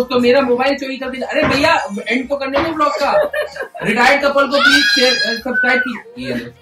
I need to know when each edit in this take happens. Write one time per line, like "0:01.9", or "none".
none